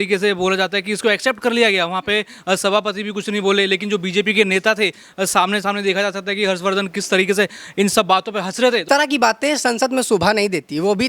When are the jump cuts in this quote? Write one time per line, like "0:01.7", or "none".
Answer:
0:08.8